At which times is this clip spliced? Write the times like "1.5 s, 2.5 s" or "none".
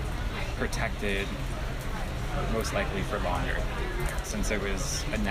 none